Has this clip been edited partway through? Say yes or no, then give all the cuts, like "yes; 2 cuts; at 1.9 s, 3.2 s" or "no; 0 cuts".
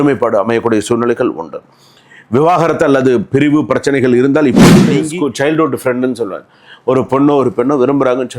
yes; 1 cut; at 5.0 s